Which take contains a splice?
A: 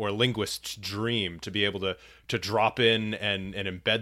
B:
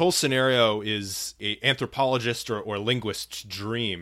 B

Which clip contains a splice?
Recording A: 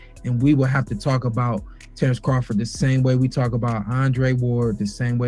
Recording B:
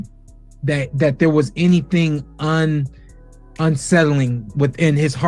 A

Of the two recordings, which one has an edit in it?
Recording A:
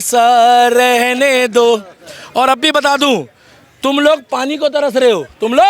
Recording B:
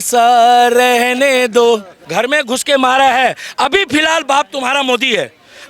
B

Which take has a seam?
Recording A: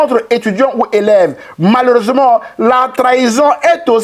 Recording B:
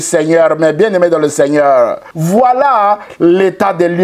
B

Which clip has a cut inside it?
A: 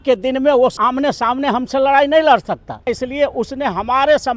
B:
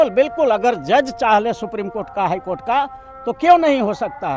A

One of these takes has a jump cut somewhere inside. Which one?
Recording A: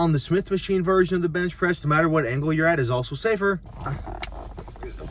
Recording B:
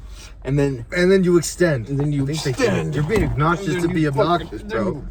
A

